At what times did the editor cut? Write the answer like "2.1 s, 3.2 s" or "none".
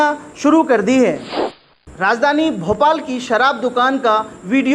1.6 s